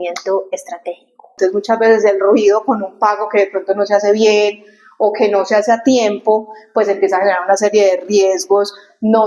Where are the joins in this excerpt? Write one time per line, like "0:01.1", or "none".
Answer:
0:01.3